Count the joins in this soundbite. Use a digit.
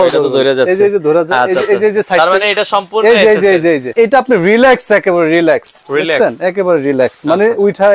1